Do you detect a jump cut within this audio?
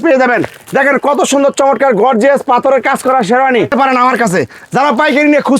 yes; 1 cut; at 3.7 s

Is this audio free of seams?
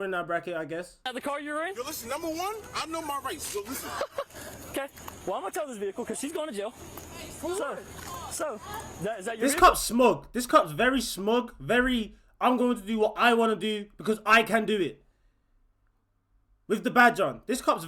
no; 1 cut; at 1.1 s

